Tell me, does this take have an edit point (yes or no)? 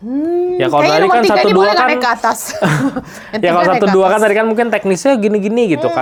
no